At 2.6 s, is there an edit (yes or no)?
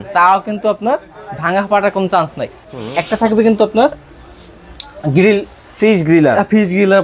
yes